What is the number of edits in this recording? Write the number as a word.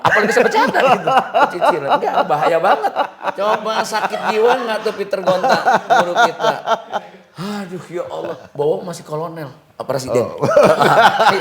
two